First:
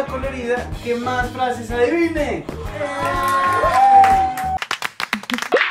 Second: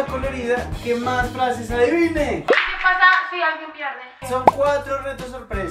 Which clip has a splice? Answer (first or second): second